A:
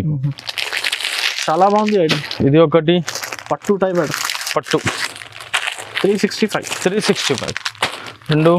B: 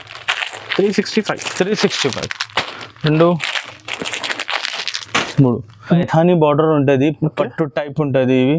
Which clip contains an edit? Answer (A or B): B